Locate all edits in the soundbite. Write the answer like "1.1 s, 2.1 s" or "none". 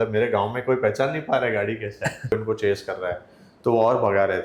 2.3 s